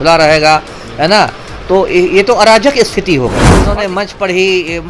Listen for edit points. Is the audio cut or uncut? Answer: cut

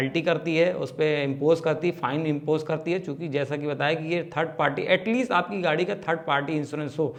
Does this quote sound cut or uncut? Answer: uncut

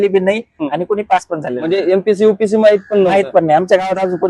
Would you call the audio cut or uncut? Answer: uncut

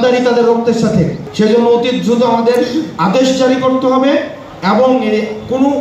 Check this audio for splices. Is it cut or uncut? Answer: cut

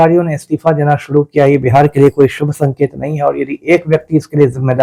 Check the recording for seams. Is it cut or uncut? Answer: uncut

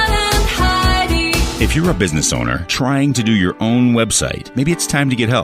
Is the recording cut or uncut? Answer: cut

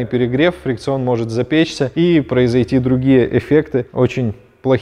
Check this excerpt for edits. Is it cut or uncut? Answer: uncut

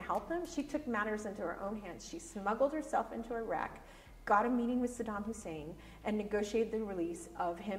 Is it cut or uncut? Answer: uncut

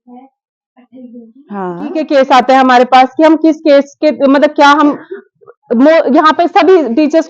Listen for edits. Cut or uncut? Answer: cut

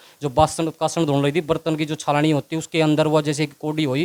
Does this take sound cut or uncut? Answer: uncut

